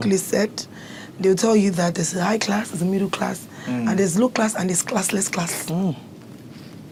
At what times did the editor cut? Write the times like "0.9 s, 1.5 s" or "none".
none